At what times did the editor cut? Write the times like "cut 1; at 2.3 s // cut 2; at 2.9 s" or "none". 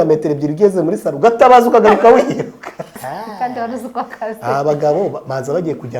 cut 1; at 2.9 s